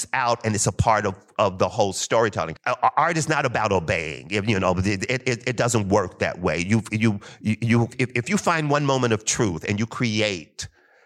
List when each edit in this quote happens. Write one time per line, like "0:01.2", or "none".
0:02.6
0:07.9